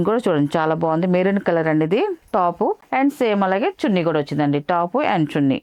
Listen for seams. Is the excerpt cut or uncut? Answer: uncut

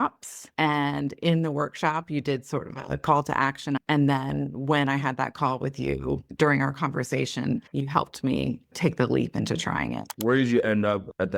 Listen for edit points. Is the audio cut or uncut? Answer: cut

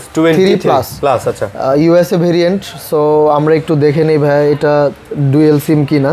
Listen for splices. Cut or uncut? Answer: uncut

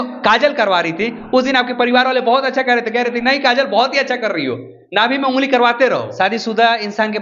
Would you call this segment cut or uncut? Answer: cut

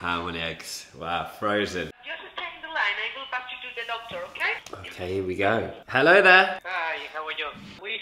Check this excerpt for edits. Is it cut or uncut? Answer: cut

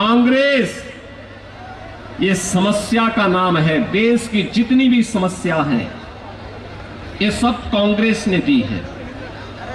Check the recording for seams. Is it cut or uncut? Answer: uncut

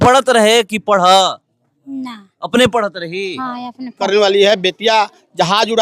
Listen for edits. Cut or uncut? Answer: cut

